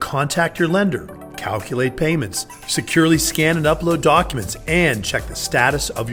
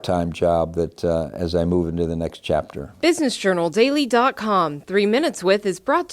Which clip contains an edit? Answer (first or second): second